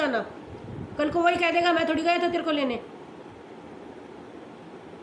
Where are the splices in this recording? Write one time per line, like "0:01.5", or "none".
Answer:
none

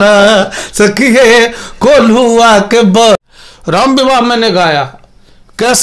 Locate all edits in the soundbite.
0:03.2

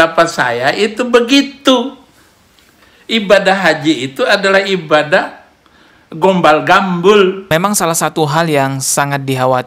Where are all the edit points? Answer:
0:07.4

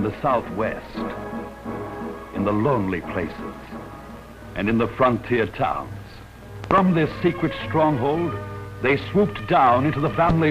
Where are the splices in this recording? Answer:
0:04.3

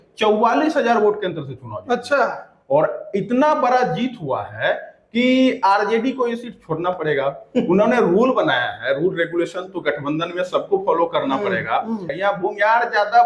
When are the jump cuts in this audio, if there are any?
0:12.1

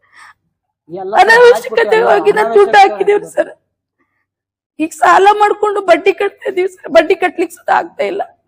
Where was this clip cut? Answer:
none

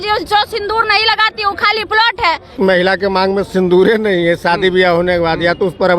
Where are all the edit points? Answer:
0:02.5

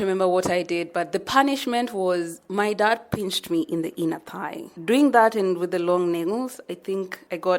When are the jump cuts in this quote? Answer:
0:04.7

